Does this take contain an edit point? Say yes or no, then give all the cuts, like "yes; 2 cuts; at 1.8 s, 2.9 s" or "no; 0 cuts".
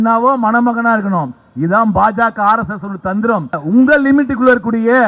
yes; 1 cut; at 3.6 s